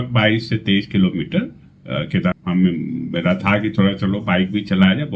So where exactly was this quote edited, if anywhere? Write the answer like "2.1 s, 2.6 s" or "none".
2.4 s